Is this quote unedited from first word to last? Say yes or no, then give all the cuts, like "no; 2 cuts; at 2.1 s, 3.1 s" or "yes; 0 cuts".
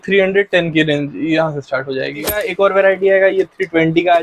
no; 1 cut; at 2.4 s